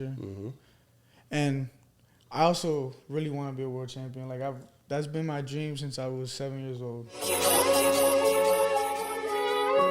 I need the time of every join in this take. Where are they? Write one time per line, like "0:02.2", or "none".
0:07.6